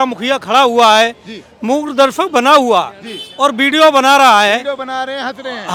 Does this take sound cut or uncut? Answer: uncut